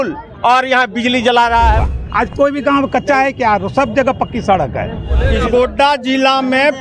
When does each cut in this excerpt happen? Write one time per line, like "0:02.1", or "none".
0:02.0
0:05.2